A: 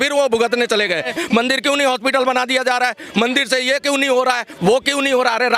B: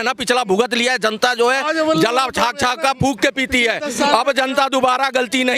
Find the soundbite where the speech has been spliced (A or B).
A